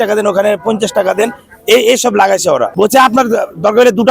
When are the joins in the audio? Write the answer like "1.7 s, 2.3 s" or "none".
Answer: 2.7 s